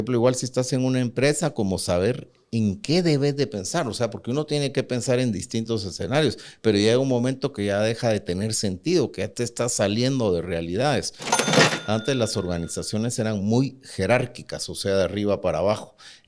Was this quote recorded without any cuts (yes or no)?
no